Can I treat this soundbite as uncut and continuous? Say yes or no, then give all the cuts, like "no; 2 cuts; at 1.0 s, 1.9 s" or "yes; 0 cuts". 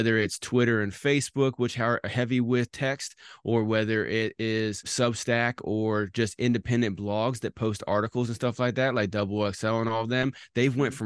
no; 1 cut; at 4.9 s